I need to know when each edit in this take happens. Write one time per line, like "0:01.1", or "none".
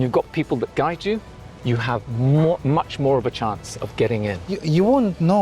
0:04.5